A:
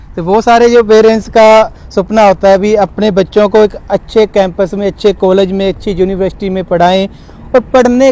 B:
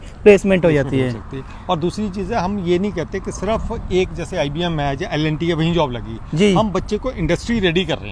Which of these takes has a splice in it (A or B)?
A